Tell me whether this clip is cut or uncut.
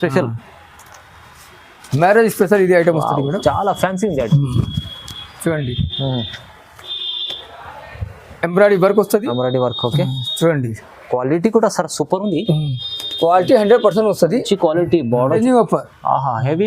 cut